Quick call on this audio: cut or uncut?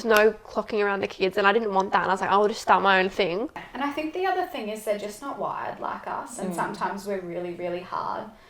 cut